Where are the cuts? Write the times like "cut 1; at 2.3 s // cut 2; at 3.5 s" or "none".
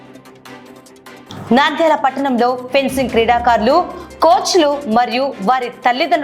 cut 1; at 1.2 s